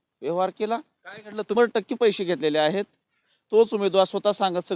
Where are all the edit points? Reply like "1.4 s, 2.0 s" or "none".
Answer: 1.5 s